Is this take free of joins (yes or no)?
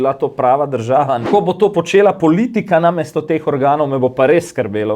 no